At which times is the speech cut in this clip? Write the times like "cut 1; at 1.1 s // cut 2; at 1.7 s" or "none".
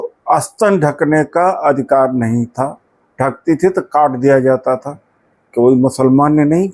none